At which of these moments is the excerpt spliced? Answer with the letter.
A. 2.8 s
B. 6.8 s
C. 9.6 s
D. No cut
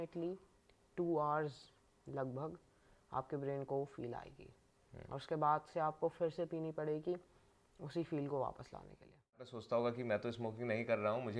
C